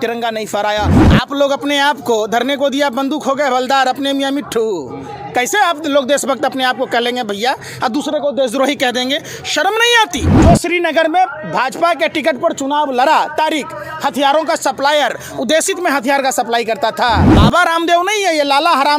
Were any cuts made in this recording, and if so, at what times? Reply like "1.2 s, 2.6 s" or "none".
1.0 s, 10.3 s, 17.3 s